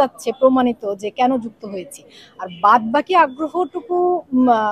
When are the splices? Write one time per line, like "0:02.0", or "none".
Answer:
none